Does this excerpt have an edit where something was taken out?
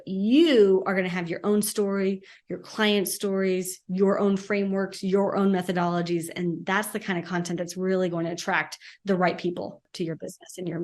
yes; 1 cut; at 9.9 s

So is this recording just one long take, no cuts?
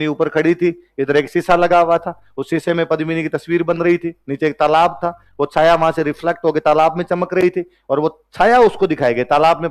yes; 0 cuts

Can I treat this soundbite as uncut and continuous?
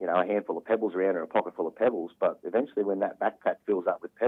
yes; 0 cuts

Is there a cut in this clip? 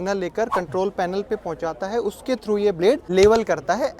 yes; 1 cut; at 3.0 s

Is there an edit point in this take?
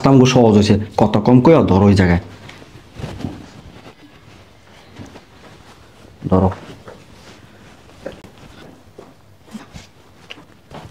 no; 0 cuts

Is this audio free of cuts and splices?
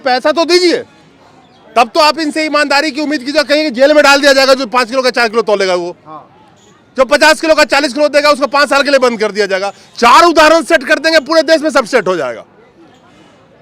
yes; 0 cuts

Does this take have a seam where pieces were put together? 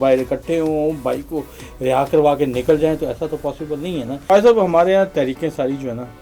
yes; 1 cut; at 4.2 s

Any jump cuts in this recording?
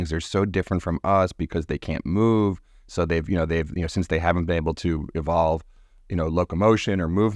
no; 0 cuts

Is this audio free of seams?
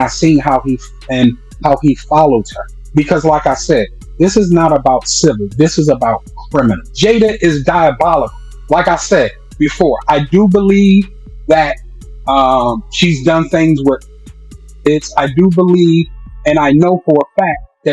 no; 1 cut; at 6.8 s

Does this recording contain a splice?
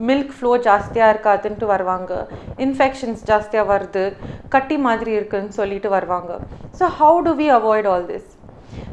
no; 0 cuts

